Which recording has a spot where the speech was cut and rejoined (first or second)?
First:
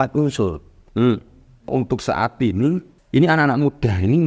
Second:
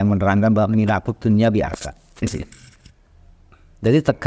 first